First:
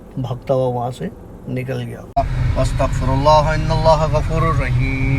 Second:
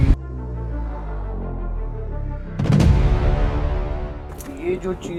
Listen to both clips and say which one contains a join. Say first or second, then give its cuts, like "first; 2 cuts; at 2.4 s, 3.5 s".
first; 1 cut; at 2.0 s